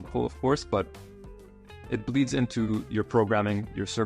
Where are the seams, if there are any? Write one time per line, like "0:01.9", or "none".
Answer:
none